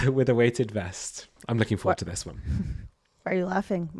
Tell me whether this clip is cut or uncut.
uncut